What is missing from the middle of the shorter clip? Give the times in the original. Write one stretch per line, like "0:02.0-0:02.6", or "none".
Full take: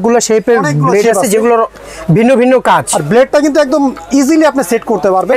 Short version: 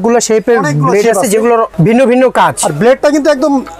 0:01.7-0:02.0